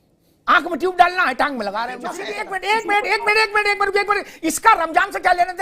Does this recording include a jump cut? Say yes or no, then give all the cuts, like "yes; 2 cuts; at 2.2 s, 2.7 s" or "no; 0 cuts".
yes; 1 cut; at 2.3 s